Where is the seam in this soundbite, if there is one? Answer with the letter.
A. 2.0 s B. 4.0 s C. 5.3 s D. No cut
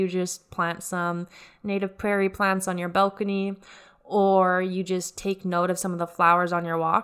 D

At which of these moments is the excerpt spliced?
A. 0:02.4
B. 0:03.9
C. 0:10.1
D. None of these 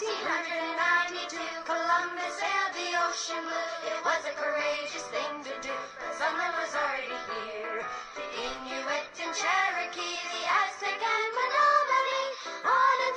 D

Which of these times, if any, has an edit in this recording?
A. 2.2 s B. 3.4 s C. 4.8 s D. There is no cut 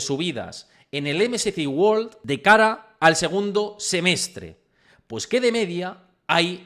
A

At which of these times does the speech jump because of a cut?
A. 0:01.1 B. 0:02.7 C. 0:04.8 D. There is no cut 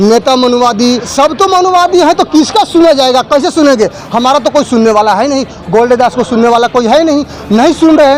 A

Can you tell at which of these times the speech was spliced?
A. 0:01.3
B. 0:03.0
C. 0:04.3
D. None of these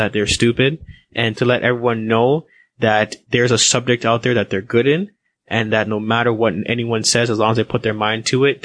A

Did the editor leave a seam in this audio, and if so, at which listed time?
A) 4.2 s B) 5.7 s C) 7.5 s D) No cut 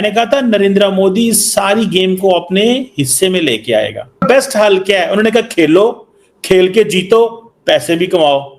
A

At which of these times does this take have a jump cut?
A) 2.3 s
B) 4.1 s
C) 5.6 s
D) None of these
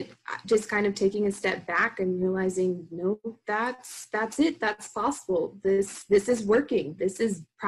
D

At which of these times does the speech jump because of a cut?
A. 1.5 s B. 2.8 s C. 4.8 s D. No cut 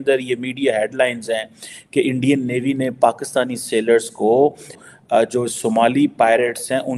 C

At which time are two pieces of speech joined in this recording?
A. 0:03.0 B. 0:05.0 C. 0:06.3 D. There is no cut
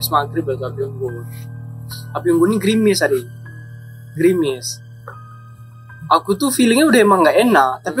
D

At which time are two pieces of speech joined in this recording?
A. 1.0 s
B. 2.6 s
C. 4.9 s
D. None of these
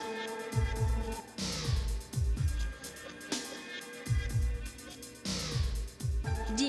A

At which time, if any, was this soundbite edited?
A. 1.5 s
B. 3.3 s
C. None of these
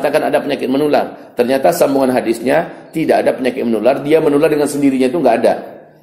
C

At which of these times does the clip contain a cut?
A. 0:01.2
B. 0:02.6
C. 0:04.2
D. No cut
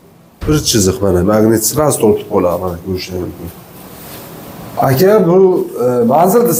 D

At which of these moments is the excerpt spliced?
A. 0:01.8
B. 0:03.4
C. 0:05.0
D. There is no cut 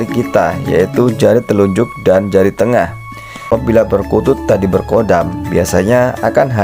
B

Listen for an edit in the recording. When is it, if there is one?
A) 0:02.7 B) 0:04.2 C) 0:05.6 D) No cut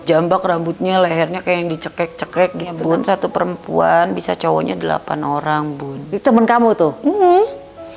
A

